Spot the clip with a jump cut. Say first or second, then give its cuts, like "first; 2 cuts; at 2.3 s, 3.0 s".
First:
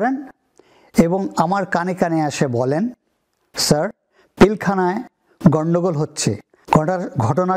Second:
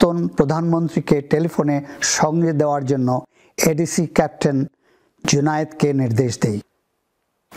first; 1 cut; at 6.5 s